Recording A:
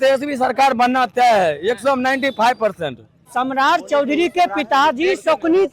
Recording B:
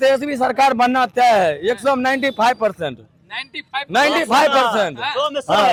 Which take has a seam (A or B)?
A